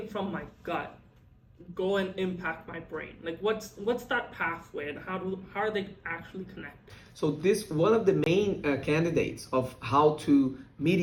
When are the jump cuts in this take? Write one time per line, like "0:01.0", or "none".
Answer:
none